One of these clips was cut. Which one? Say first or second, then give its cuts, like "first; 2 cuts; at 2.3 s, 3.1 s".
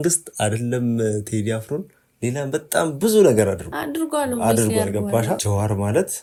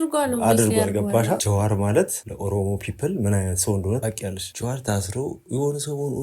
second; 1 cut; at 4.5 s